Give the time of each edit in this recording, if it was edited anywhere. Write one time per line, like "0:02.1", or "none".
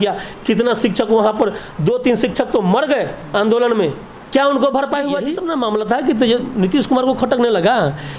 0:05.4